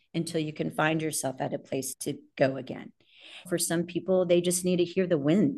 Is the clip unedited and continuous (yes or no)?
no